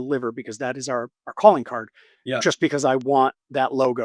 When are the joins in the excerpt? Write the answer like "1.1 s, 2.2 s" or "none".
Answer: 1.2 s